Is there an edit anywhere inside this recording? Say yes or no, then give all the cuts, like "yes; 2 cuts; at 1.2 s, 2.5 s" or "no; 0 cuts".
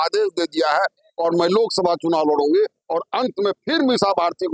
no; 0 cuts